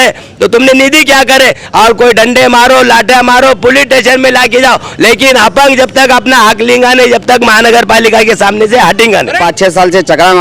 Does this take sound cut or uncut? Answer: cut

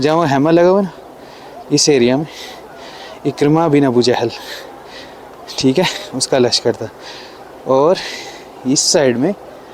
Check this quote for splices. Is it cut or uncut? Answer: uncut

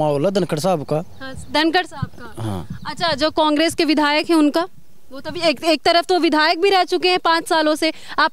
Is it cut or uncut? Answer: uncut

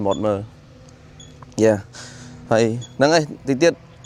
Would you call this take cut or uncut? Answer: uncut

